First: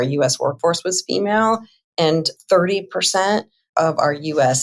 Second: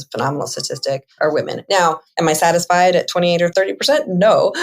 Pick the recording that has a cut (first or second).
second